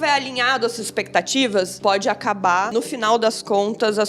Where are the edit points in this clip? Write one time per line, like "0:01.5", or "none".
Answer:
0:01.7
0:02.7